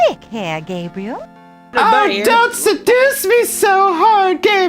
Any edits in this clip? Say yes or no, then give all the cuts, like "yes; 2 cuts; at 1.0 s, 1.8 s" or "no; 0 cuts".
yes; 1 cut; at 1.7 s